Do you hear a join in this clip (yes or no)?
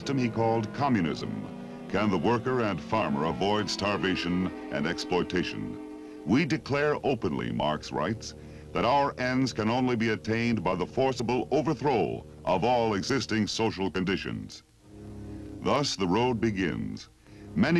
no